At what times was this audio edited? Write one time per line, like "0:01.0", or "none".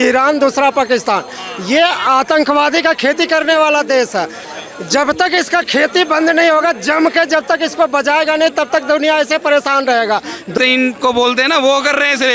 0:10.5